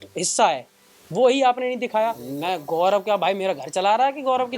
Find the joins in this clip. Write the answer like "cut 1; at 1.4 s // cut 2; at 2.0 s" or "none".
cut 1; at 2.3 s